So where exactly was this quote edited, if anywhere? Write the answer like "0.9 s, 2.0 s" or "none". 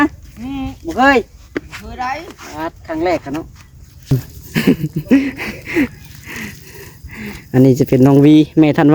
4.1 s